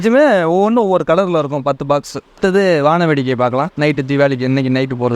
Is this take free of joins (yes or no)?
yes